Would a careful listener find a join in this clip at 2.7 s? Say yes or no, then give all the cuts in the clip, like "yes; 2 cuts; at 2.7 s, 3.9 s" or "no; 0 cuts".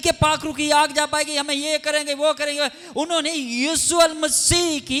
no; 0 cuts